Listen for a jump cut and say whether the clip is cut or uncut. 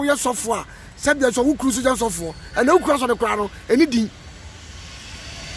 uncut